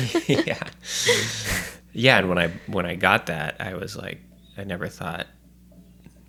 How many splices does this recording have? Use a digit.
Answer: 0